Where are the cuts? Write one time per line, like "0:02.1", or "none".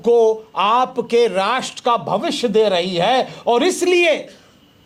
none

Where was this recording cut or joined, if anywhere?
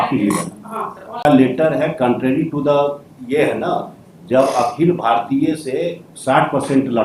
0:01.2

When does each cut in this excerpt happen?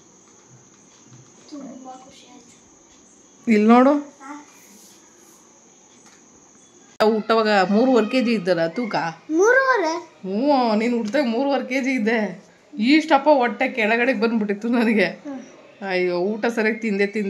0:07.0

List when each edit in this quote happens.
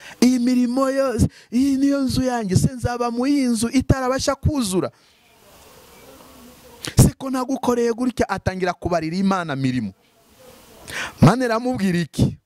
none

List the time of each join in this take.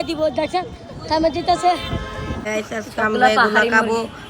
0:02.6

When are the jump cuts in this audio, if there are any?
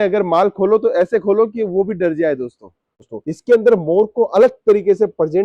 0:03.1

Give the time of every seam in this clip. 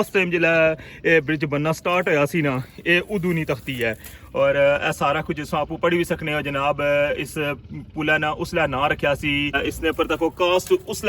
0:09.6

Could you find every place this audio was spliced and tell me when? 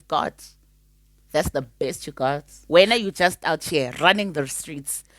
0:02.7

